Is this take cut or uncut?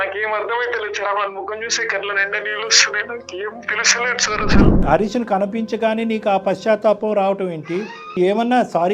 cut